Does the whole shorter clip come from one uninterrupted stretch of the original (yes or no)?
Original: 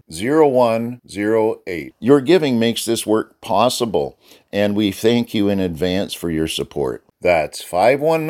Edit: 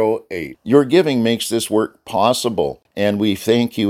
no